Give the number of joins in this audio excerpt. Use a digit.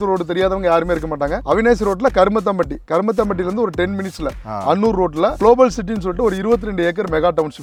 0